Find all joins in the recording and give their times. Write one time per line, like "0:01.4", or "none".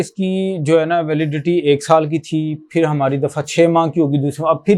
none